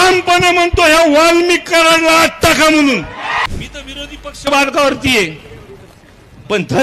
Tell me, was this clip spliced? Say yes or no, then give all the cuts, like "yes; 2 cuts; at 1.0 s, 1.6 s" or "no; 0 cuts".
yes; 1 cut; at 3.5 s